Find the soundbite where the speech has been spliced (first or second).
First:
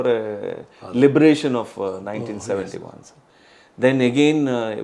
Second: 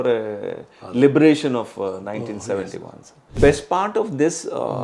second